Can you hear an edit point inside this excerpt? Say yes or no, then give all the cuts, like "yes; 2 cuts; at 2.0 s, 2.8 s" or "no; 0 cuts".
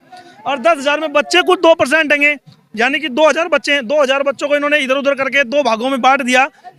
no; 0 cuts